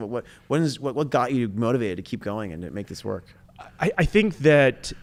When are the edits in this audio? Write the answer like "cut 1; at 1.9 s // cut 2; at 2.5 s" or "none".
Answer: none